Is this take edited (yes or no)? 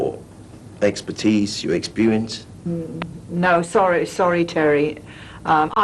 yes